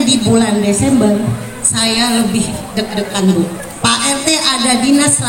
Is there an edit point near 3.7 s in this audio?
yes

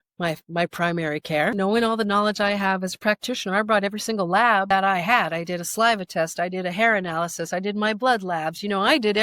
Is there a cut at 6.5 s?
no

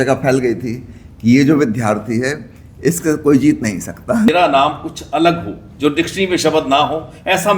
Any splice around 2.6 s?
no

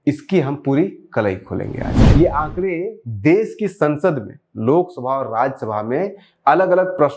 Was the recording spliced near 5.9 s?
no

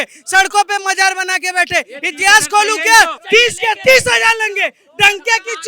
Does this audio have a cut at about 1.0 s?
no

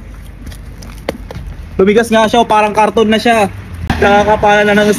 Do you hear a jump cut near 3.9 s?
yes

